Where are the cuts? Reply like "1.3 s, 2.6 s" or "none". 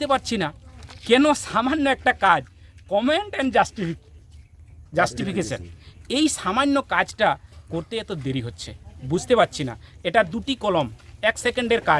none